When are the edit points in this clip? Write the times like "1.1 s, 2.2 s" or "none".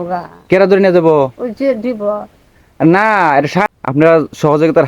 3.7 s